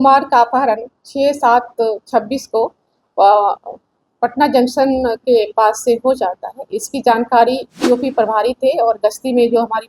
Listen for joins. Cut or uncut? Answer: cut